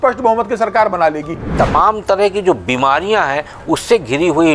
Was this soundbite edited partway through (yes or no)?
yes